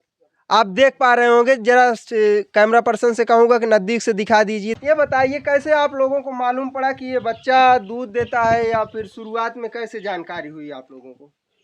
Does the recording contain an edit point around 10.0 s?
no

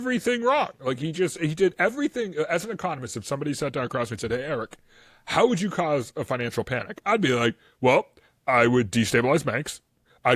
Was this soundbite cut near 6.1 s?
no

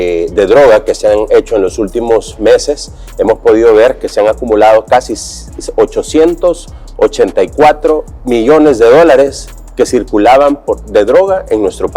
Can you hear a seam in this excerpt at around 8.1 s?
yes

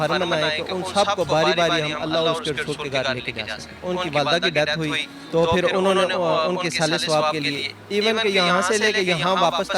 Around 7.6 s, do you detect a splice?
yes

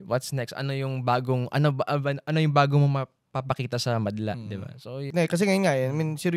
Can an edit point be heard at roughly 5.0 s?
yes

